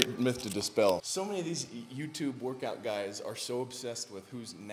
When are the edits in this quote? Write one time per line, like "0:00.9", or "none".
0:01.0